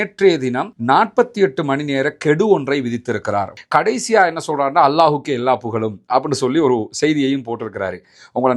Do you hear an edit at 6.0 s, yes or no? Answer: no